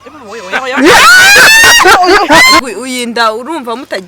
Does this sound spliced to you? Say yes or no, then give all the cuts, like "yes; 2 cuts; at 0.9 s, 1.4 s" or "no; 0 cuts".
yes; 1 cut; at 2.6 s